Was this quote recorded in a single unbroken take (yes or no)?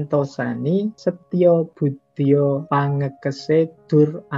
no